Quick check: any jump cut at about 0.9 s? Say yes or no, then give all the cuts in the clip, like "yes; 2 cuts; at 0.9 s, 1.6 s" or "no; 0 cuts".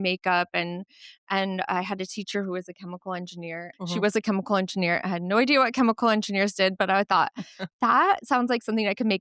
no; 1 cut; at 3.7 s